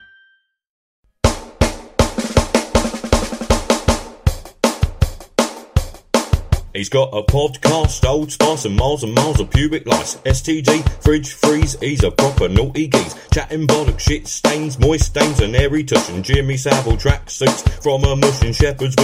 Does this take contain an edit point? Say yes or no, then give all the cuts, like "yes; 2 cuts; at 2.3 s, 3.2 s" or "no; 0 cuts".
yes; 1 cut; at 1.0 s